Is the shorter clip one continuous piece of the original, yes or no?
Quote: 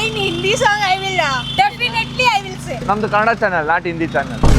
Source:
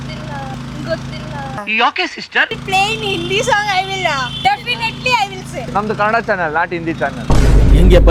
yes